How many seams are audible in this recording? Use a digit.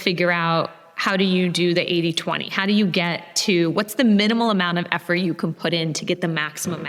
0